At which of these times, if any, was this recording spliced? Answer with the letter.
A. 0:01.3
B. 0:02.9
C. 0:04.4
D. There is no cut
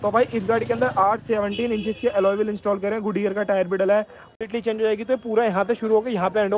C